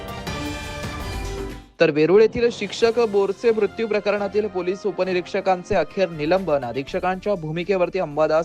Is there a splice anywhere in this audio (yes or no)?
yes